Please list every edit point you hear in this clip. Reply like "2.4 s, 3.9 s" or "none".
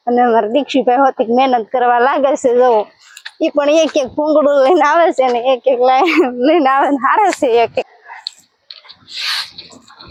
none